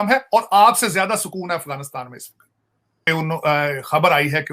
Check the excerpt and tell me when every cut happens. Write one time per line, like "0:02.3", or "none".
0:03.1